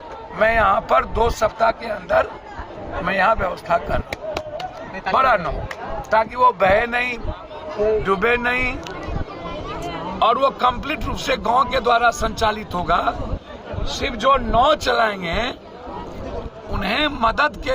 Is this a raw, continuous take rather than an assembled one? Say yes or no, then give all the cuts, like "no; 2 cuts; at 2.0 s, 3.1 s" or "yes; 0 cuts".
yes; 0 cuts